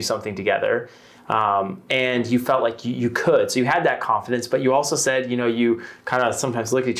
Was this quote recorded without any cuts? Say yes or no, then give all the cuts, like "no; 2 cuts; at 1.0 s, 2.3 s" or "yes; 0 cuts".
yes; 0 cuts